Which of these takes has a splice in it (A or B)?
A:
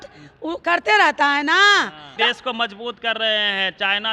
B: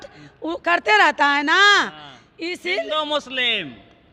A